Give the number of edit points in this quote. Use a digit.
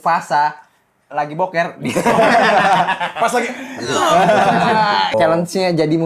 1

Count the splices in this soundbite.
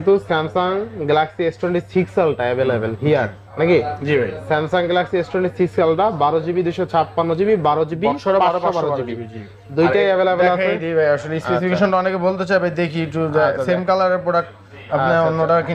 0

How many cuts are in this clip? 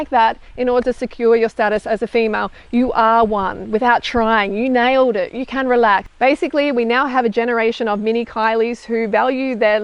1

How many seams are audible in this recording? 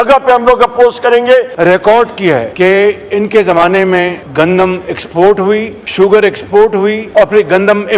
5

